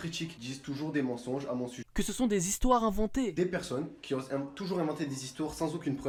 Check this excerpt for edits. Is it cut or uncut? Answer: uncut